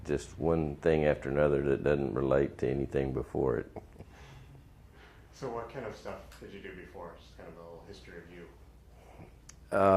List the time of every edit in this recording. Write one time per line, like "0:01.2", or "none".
0:02.5